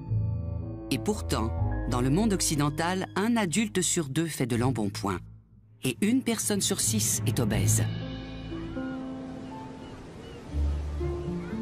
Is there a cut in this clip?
yes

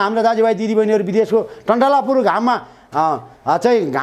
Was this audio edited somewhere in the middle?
no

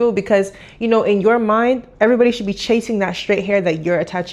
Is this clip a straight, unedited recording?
yes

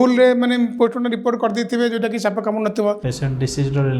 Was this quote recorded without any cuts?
no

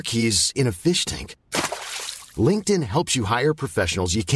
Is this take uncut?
yes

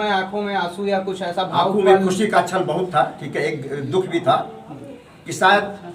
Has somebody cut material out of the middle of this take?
no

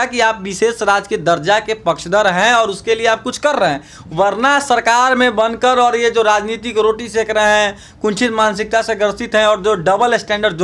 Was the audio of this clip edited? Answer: no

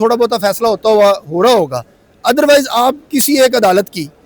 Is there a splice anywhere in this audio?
no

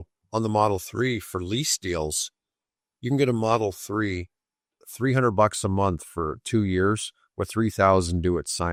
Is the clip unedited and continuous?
yes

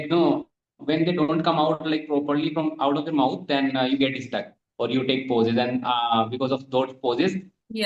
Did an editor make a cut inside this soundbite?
no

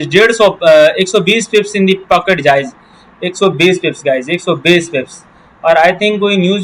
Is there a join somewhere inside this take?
no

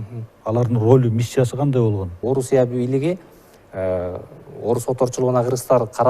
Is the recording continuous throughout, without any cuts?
no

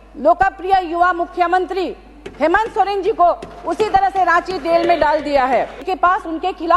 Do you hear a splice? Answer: yes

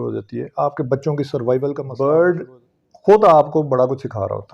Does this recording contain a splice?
yes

